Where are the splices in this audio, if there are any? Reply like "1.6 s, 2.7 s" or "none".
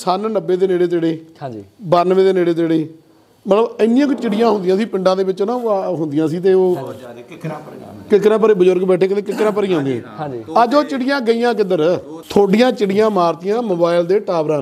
12.1 s

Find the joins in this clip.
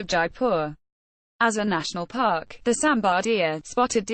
2.5 s

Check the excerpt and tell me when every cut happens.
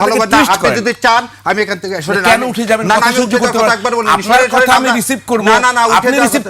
none

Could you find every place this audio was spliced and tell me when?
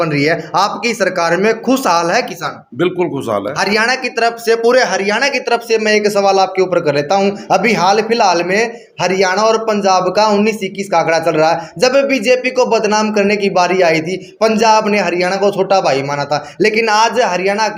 none

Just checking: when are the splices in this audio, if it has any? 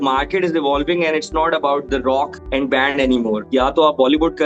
2.4 s, 3.4 s

